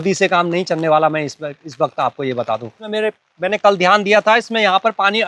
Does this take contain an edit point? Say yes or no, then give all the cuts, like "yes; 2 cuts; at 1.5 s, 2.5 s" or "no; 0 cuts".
yes; 1 cut; at 2.8 s